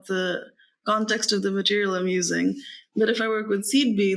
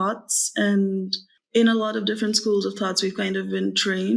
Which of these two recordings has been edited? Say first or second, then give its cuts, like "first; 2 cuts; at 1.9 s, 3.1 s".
second; 1 cut; at 1.2 s